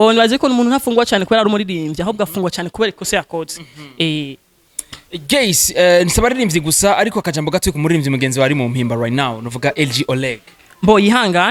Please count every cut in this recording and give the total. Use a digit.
0